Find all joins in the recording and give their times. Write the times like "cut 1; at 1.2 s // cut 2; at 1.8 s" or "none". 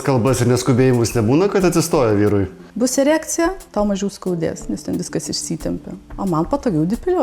cut 1; at 2.6 s